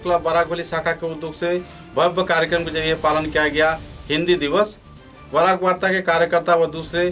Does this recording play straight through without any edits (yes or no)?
yes